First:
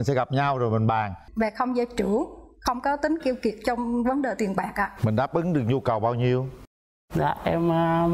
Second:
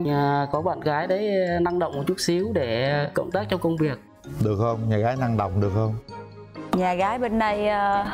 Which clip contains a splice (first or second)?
first